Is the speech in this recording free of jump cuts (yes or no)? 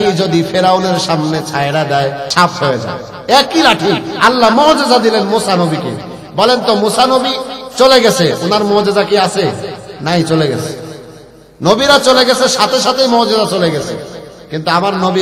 no